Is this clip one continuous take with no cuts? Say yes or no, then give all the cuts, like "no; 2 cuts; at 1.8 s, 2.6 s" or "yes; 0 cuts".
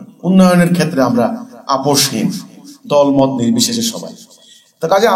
yes; 0 cuts